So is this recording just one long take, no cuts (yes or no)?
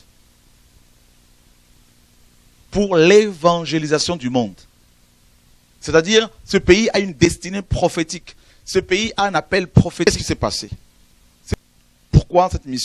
no